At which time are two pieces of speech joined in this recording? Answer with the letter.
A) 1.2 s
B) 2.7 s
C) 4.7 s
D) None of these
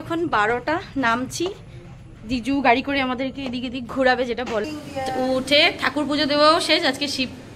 C